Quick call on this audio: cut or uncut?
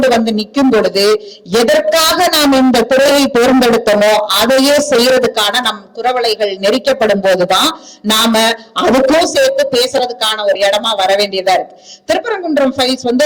uncut